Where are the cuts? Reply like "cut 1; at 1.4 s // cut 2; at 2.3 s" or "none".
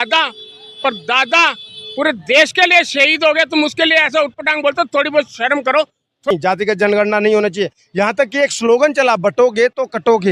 cut 1; at 6.3 s